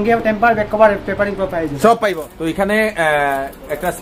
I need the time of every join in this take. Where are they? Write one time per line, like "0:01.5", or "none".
0:02.2

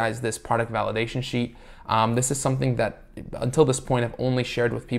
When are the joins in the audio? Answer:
none

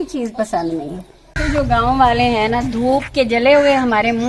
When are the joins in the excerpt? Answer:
0:01.4

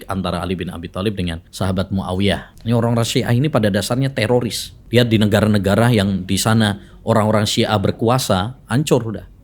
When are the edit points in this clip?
0:01.4
0:02.5
0:04.7

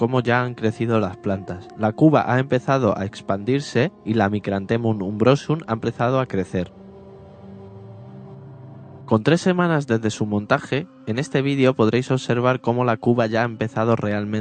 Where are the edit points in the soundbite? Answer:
0:08.9

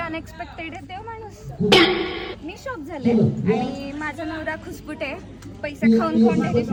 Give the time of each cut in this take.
none

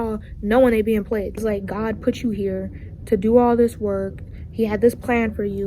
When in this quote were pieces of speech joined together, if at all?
0:01.4

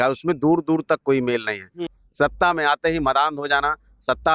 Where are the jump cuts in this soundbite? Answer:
0:01.9

